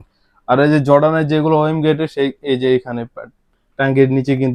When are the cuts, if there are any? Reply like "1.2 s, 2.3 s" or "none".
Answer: none